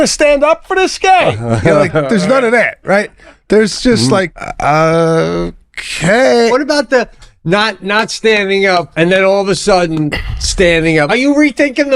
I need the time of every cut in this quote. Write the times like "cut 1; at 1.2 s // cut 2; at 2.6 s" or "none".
cut 1; at 4.4 s // cut 2; at 6.5 s // cut 3; at 8.9 s // cut 4; at 11.1 s